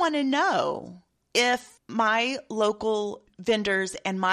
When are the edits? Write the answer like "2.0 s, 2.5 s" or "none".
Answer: 1.8 s, 3.3 s